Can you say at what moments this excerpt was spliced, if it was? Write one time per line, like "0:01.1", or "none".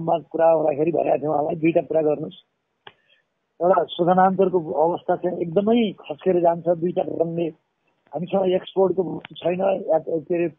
none